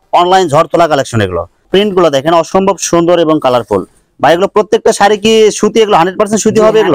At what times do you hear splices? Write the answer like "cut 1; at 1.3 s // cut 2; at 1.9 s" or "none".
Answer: cut 1; at 1.5 s